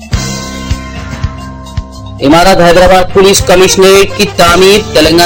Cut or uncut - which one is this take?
uncut